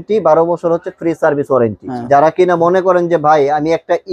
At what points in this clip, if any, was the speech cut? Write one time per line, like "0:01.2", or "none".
0:01.9